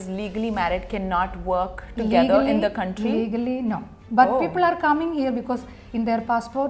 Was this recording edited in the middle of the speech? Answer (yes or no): no